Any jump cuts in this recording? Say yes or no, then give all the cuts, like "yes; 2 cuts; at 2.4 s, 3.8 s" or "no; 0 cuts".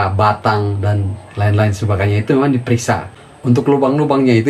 yes; 1 cut; at 3.2 s